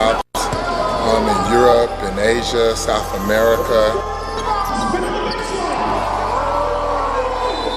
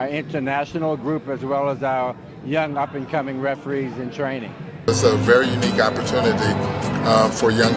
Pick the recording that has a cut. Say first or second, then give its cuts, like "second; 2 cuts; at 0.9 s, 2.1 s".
first; 2 cuts; at 3.1 s, 6.7 s